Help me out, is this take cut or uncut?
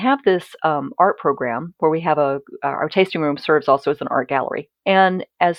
cut